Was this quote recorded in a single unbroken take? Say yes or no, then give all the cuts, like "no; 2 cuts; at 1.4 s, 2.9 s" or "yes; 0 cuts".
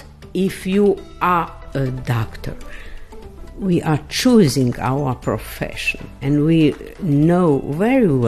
yes; 0 cuts